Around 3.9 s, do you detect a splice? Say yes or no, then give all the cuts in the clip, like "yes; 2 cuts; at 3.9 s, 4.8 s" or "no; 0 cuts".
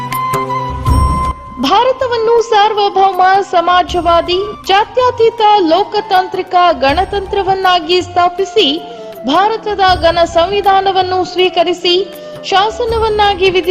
no; 1 cut; at 1.3 s